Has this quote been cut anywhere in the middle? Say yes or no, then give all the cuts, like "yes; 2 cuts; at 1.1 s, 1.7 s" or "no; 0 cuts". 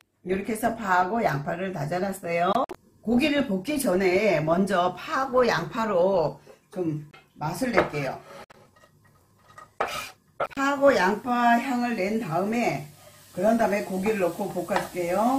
no; 0 cuts